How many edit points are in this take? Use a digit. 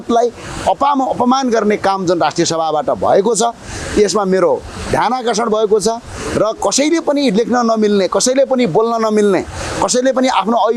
0